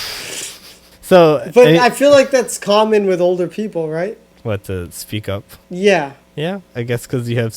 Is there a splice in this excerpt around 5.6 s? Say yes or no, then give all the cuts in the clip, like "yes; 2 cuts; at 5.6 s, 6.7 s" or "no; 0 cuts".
yes; 4 cuts; at 0.9 s, 4.3 s, 5.6 s, 6.2 s